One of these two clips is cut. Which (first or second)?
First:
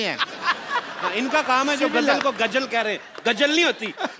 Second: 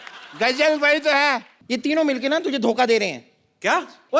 second